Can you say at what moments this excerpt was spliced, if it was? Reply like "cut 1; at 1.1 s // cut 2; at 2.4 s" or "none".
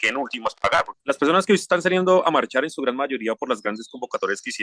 cut 1; at 0.9 s